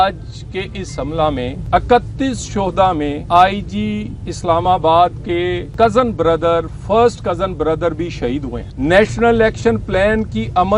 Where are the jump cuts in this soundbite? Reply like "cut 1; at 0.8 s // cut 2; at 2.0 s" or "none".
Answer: cut 1; at 1.6 s // cut 2; at 3.2 s // cut 3; at 5.6 s // cut 4; at 8.6 s